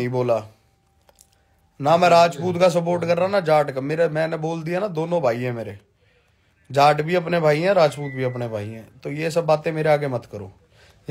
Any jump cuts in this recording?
no; 0 cuts

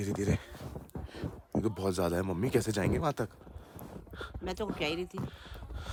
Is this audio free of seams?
yes; 0 cuts

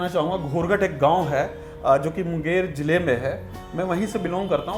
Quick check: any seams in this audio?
no; 0 cuts

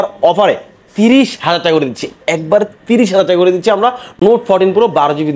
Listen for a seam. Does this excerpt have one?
no; 0 cuts

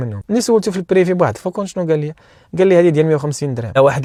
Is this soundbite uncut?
yes; 0 cuts

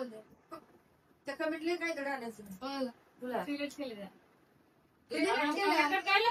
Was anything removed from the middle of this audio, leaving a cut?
no; 0 cuts

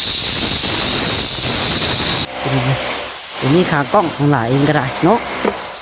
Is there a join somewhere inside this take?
yes; 1 cut; at 2.3 s

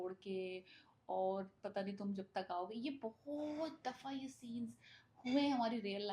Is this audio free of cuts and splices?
yes; 0 cuts

